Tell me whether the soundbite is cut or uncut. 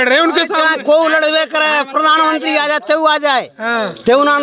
uncut